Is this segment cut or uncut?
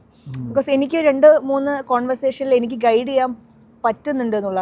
uncut